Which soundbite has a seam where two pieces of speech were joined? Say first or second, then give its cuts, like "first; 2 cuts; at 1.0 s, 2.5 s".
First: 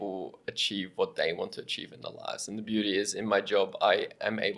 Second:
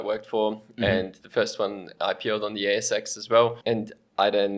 second; 1 cut; at 3.6 s